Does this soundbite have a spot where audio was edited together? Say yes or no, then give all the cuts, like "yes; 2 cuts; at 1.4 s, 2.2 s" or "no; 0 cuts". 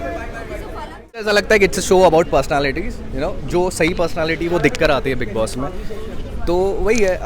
yes; 1 cut; at 1.3 s